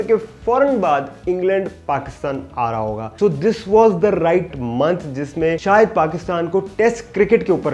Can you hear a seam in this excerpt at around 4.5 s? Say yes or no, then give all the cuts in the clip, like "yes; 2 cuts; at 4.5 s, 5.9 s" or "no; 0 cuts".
yes; 2 cuts; at 3.1 s, 4.5 s